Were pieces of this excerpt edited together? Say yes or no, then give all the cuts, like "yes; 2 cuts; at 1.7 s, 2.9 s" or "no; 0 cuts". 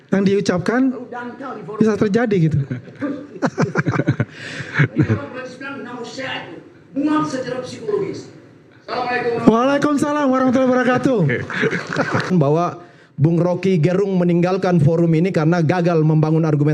yes; 1 cut; at 12.3 s